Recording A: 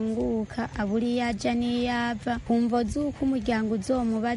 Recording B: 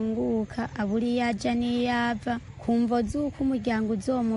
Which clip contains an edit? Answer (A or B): A